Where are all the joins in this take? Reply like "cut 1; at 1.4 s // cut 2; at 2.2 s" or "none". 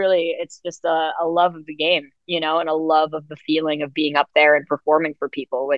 none